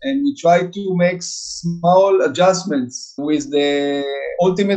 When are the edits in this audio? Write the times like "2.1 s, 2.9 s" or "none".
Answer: 3.1 s